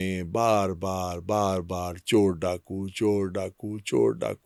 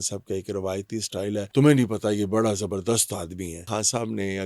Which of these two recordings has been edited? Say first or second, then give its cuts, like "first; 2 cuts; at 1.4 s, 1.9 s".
second; 2 cuts; at 1.5 s, 3.6 s